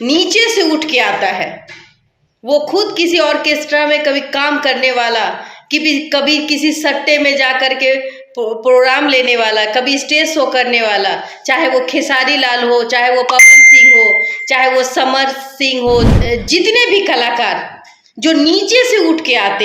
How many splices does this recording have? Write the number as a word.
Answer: one